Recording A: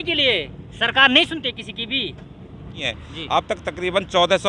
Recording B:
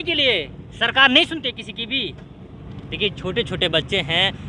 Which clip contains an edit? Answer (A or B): A